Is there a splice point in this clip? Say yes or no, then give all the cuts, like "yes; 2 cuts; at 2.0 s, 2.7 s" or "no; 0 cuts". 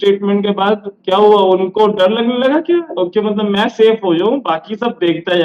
no; 0 cuts